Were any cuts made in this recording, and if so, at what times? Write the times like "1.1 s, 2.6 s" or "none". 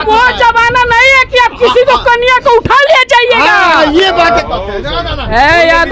4.2 s